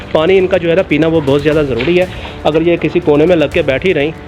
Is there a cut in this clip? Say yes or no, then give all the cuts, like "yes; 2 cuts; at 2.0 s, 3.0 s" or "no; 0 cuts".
no; 0 cuts